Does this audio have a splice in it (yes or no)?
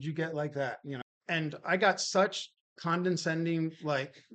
yes